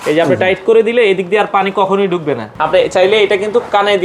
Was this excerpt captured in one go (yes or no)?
no